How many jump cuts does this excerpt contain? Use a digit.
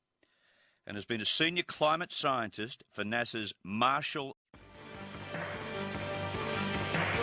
0